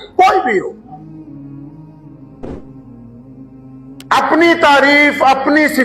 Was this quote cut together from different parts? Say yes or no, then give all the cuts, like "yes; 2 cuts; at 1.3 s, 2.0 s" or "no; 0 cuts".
no; 0 cuts